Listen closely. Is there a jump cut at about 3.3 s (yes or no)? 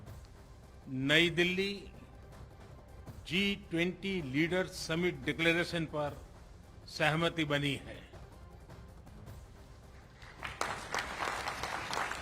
yes